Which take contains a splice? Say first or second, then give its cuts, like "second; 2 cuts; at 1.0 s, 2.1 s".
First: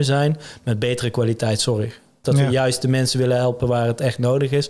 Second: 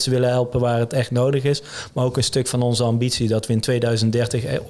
first; 1 cut; at 2.2 s